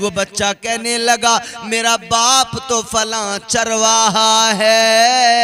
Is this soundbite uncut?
yes; 0 cuts

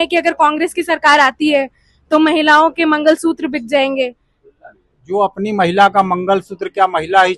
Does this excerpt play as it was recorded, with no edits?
yes; 0 cuts

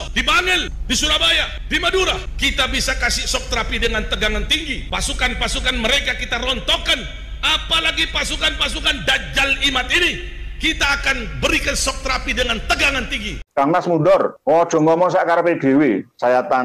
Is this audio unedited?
no; 1 cut; at 13.4 s

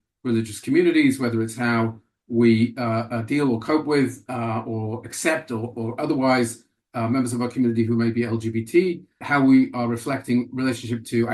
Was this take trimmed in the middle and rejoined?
no; 0 cuts

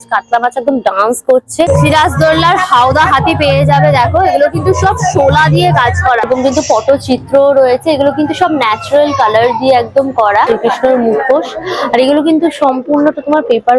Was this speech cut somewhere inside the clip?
yes; 3 cuts; at 1.7 s, 6.3 s, 10.5 s

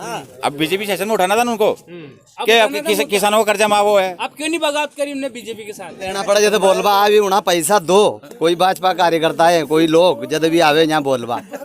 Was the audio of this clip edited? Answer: yes; 1 cut; at 6.1 s

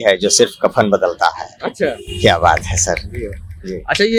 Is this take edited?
no; 0 cuts

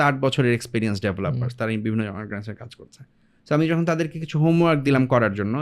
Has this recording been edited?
no; 0 cuts

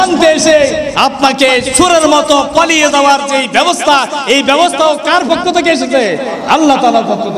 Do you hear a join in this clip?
no; 0 cuts

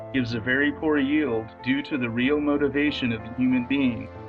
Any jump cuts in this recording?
no; 0 cuts

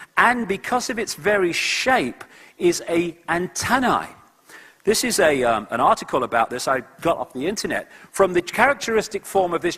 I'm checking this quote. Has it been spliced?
yes; 1 cut; at 8.2 s

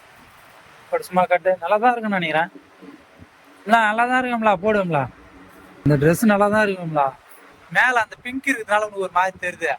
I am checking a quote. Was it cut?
yes; 1 cut; at 5.9 s

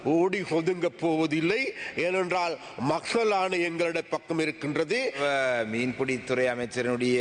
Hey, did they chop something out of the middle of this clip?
yes; 1 cut; at 5.2 s

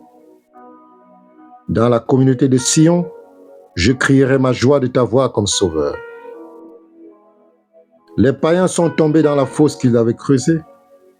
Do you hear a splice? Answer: no; 0 cuts

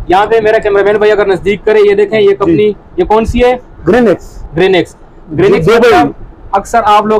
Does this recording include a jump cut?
no; 0 cuts

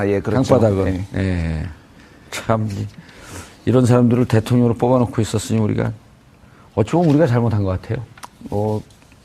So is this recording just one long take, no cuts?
no; 1 cut; at 5.1 s

